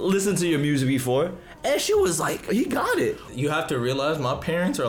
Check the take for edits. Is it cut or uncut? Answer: cut